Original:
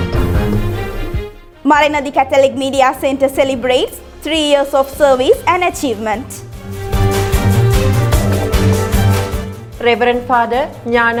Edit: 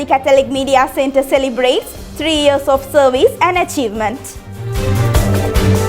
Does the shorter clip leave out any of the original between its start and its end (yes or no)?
yes